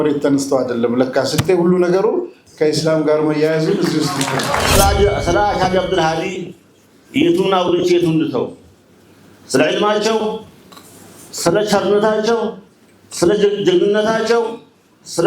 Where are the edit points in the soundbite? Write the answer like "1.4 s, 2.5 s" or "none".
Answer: 4.8 s